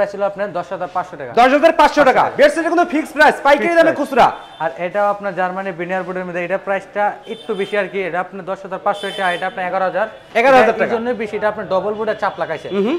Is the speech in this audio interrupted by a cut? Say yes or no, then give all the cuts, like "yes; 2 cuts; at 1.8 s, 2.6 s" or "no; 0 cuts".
no; 0 cuts